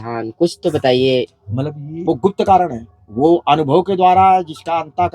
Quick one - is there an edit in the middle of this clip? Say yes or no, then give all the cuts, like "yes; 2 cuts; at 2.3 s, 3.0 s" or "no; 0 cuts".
yes; 1 cut; at 1.9 s